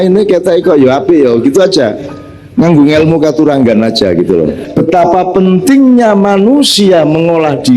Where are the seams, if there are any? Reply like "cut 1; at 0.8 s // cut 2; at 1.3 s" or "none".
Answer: cut 1; at 4.8 s